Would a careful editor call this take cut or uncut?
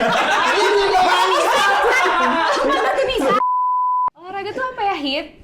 uncut